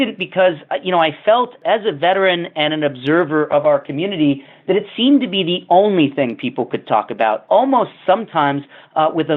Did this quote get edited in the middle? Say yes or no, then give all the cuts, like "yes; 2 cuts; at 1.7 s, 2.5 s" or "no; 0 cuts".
yes; 2 cuts; at 1.6 s, 7.4 s